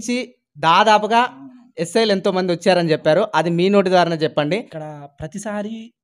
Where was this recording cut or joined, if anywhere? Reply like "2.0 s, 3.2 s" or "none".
4.7 s